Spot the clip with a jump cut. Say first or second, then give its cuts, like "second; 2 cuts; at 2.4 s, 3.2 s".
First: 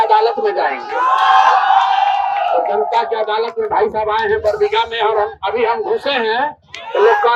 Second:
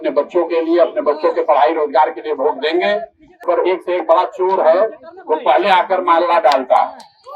second; 1 cut; at 3.4 s